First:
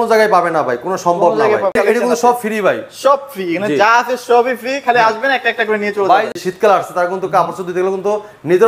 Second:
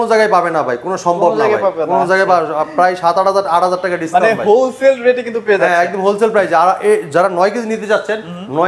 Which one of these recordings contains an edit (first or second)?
first